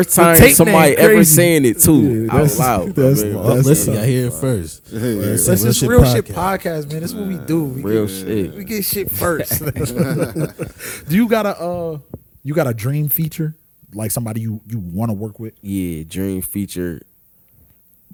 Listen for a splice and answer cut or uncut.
uncut